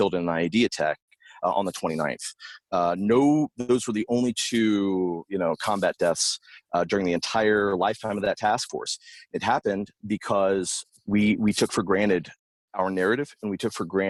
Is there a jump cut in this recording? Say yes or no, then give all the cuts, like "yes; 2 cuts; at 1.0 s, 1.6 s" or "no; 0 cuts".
no; 0 cuts